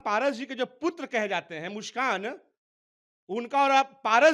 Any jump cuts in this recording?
no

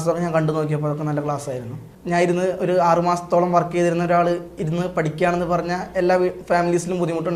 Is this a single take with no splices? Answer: no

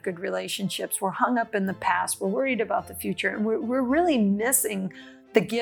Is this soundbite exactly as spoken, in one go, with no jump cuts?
yes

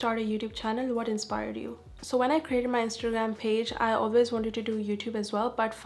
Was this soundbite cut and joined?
no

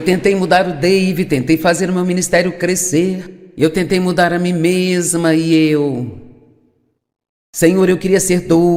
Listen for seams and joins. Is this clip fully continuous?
yes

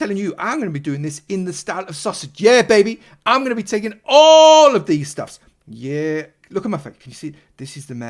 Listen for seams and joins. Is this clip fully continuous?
yes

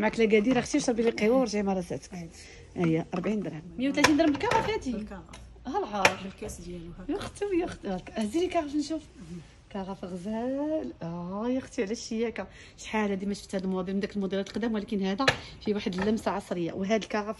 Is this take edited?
yes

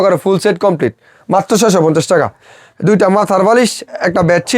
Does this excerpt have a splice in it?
no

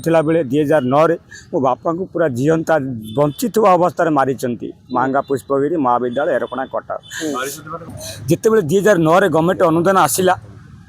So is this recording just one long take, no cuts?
no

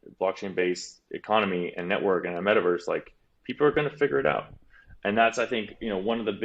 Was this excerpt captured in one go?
no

